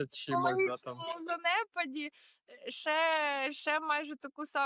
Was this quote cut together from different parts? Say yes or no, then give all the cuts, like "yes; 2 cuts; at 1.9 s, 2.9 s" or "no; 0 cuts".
no; 0 cuts